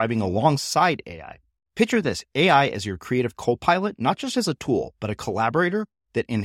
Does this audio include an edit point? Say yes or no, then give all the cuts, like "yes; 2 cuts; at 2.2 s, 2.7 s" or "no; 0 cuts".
no; 0 cuts